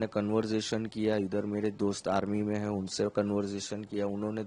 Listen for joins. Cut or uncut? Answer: uncut